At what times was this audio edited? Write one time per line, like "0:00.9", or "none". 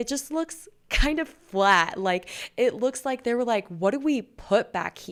none